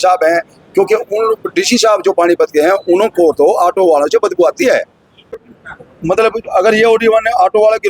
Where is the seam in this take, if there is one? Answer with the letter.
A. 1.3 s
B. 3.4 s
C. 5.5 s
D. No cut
C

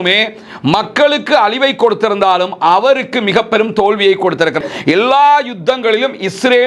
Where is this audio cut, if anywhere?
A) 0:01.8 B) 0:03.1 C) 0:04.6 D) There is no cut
C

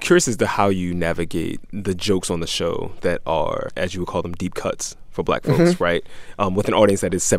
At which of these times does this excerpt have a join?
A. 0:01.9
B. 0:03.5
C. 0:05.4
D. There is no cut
D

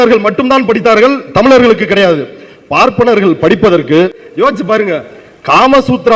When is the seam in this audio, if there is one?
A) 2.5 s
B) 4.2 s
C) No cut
B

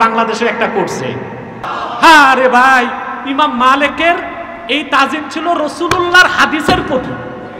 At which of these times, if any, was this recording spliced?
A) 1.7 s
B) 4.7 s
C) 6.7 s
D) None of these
A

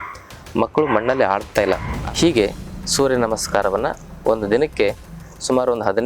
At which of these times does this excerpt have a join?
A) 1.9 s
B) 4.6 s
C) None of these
A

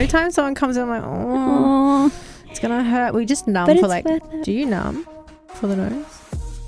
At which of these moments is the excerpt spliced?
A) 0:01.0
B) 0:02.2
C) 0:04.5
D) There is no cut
C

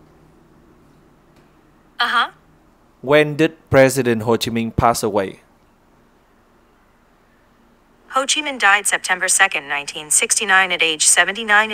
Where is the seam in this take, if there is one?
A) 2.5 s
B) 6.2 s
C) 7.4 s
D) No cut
B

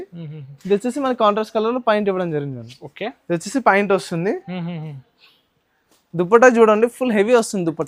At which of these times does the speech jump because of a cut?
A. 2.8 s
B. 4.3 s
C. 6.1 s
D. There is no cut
D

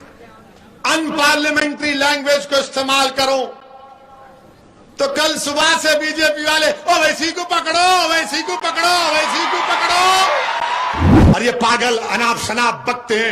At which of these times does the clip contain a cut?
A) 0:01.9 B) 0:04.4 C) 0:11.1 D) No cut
C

